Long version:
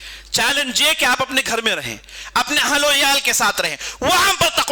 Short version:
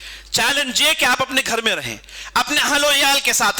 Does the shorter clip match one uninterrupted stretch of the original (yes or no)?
yes